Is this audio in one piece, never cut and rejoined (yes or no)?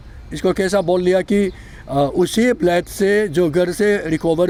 yes